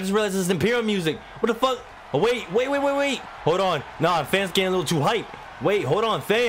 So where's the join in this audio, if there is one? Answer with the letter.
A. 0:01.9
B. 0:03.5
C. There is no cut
C